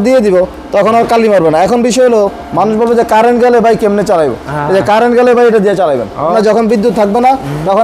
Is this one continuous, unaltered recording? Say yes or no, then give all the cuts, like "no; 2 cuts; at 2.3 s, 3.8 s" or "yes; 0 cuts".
no; 1 cut; at 6.3 s